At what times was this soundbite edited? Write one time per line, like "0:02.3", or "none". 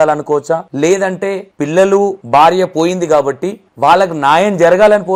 none